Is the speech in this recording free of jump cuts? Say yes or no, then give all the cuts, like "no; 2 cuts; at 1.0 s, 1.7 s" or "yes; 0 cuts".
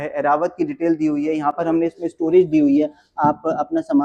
yes; 0 cuts